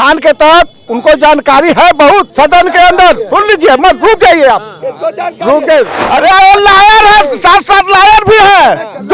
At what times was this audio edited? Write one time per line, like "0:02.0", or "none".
0:02.3
0:06.0